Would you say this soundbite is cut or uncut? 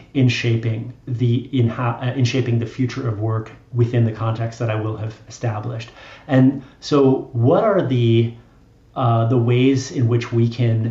uncut